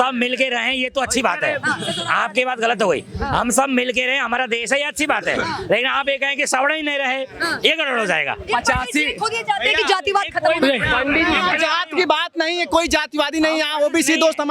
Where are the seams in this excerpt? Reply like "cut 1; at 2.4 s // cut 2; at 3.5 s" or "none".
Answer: none

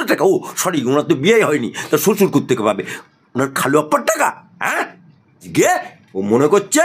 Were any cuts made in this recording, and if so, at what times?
cut 1; at 5.4 s

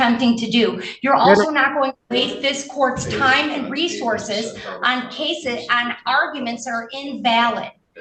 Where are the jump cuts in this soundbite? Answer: none

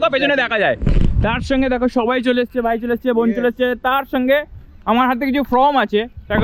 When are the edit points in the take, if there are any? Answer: none

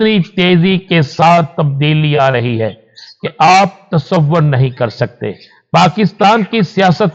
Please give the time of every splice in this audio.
none

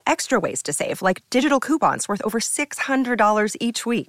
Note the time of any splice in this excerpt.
none

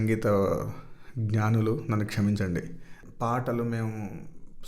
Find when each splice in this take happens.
cut 1; at 3.0 s

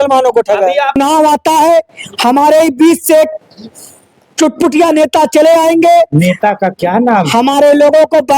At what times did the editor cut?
cut 1; at 1.0 s

